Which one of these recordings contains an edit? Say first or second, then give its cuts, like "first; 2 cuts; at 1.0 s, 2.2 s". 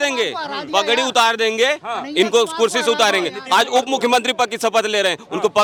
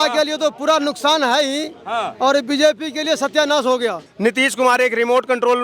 second; 1 cut; at 4.0 s